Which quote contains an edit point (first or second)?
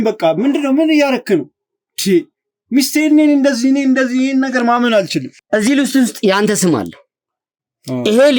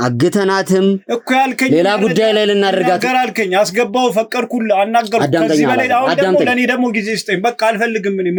first